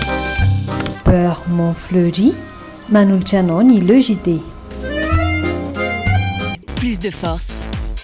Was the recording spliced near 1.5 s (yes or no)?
no